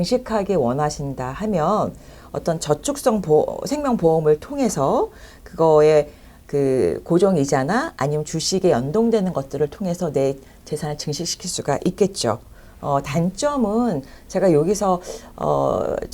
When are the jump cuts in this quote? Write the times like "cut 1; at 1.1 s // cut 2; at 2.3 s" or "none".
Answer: none